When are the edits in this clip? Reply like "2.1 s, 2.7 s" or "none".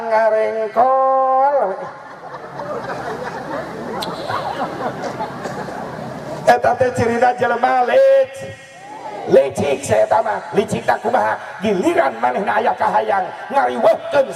none